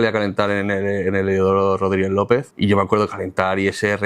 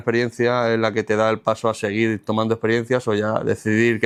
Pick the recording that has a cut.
first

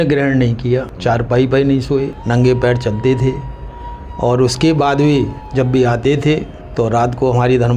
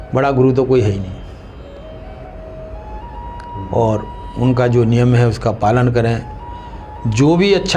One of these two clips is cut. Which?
first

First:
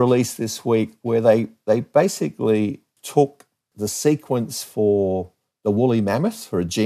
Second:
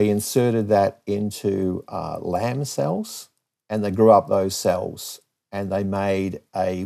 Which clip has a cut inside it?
first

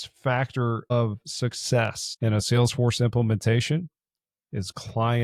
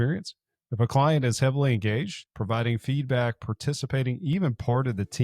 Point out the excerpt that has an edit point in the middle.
second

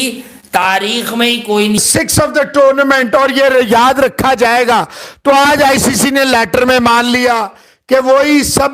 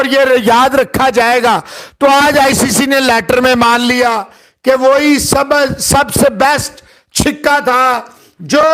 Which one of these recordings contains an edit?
first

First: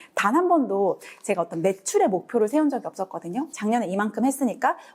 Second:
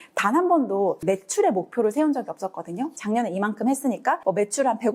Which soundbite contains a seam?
second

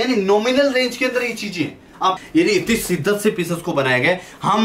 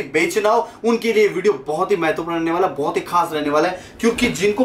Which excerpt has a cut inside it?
first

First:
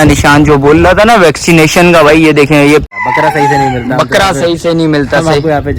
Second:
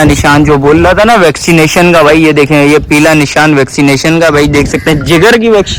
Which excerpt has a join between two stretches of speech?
first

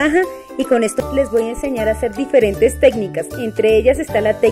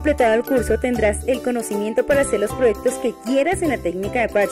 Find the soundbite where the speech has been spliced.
first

